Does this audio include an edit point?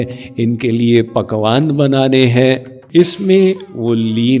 yes; 1 cut; at 2.7 s

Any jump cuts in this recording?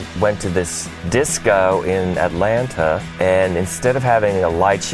yes; 1 cut; at 3.1 s

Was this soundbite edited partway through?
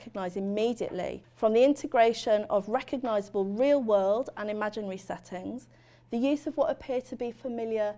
yes; 1 cut; at 1.2 s

